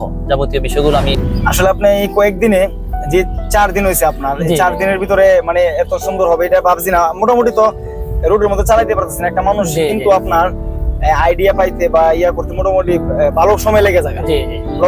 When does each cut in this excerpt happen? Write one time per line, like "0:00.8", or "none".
0:01.2

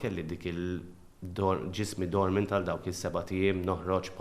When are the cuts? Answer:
none

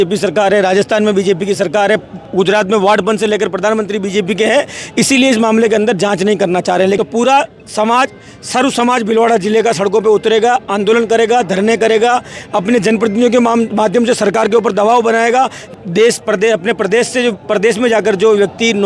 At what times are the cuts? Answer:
0:07.0
0:15.7

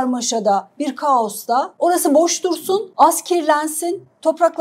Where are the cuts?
0:01.7
0:02.9

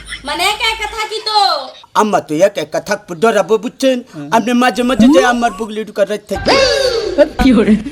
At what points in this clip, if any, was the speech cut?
0:01.7

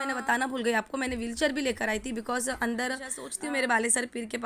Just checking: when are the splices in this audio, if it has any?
0:03.2

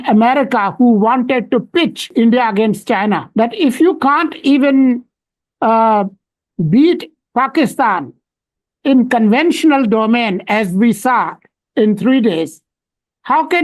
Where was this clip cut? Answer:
0:02.0
0:03.3

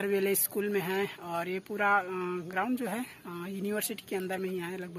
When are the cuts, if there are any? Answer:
none

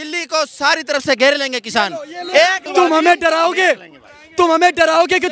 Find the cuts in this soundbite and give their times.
0:02.6

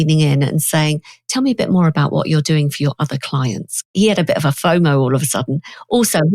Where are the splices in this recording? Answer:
0:03.9

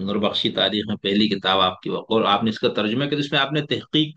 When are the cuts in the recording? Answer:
none

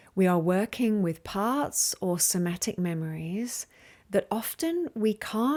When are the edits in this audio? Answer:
none

